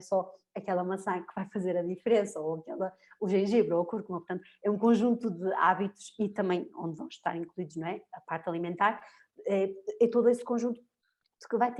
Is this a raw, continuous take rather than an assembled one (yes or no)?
yes